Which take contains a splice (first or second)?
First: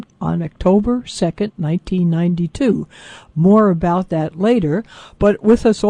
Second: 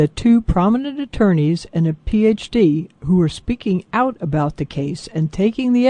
second